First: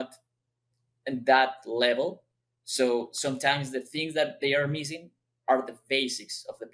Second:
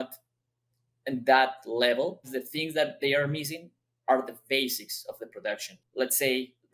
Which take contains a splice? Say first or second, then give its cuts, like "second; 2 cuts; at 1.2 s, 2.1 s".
second; 2 cuts; at 2.3 s, 5.8 s